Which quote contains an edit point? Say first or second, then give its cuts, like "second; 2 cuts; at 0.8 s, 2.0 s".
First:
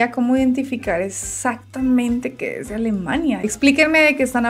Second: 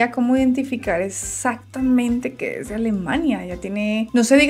first; 1 cut; at 3.4 s